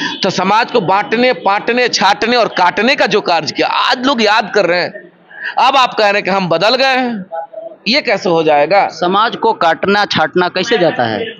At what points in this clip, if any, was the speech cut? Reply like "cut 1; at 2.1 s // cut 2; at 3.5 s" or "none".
none